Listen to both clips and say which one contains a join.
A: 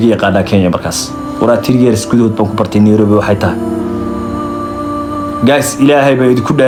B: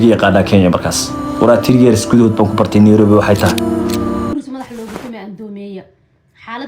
B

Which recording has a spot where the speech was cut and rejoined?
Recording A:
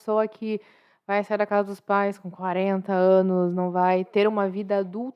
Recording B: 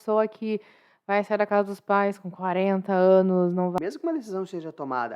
B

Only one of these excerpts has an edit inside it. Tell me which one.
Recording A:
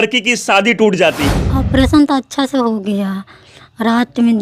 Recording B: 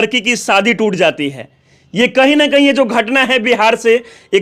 A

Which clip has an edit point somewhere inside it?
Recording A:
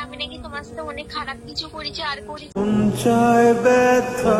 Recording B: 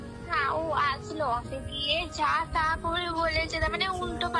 B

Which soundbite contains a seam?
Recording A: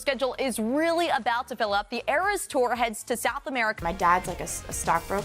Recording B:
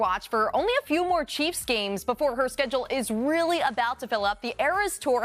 A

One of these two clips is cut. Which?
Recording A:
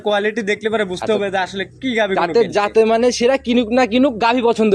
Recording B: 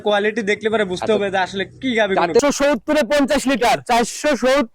B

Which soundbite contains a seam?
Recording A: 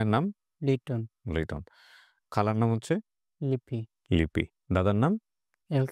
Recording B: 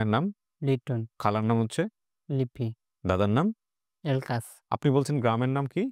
B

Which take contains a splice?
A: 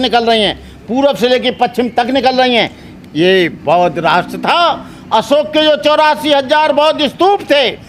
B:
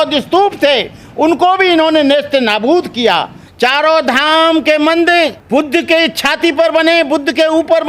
B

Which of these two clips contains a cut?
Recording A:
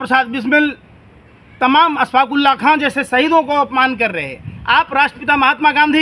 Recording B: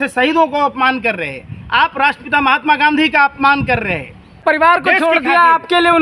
B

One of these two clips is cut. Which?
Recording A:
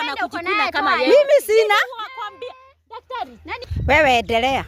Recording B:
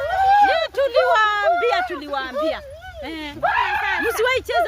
A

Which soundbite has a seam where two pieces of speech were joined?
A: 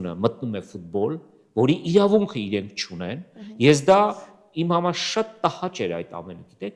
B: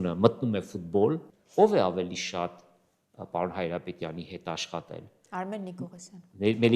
B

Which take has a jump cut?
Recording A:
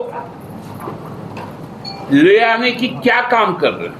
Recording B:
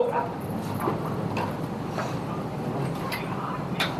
A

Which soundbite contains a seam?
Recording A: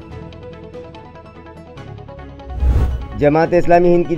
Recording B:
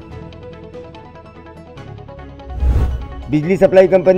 B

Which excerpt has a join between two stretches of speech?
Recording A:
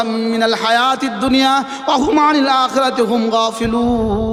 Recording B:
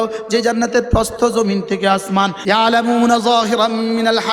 B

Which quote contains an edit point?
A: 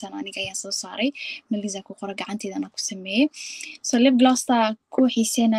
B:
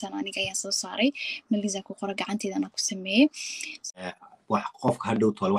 B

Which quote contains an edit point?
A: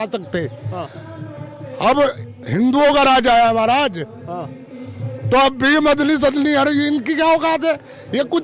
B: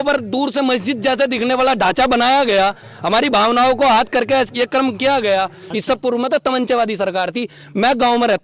B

